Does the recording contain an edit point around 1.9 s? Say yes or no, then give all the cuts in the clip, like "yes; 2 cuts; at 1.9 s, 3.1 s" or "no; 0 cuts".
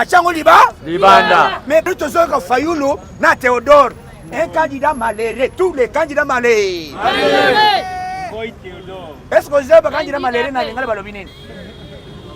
yes; 1 cut; at 1.9 s